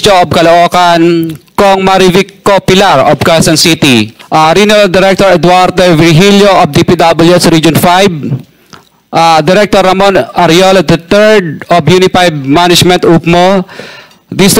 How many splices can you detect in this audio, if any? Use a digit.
1